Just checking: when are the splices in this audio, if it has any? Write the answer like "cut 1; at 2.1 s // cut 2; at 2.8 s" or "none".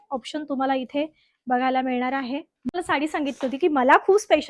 cut 1; at 2.7 s